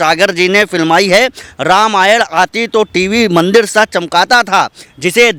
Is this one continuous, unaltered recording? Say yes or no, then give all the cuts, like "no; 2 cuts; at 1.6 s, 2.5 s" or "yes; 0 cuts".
yes; 0 cuts